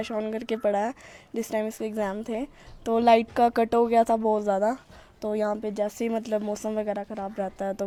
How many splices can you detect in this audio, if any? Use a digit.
0